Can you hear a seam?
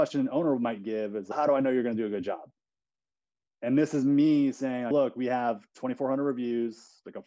yes; 2 cuts; at 1.3 s, 4.9 s

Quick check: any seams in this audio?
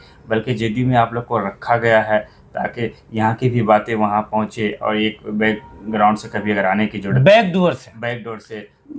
no; 0 cuts

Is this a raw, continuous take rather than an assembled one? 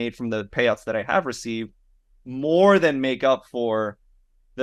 yes; 0 cuts

